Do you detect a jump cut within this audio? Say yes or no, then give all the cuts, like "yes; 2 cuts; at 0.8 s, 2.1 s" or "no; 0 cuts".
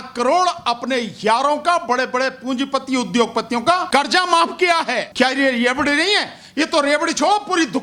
yes; 2 cuts; at 3.9 s, 5.1 s